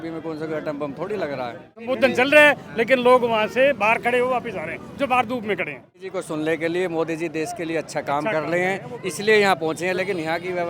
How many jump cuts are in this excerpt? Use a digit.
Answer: 2